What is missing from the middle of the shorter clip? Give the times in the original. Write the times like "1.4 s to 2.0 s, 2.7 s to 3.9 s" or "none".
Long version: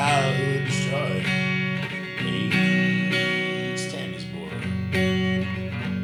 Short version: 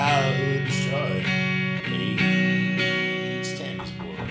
1.8 s to 2.1 s